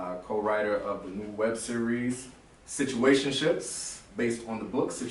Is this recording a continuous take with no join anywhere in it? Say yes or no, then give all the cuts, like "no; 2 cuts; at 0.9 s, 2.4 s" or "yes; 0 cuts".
yes; 0 cuts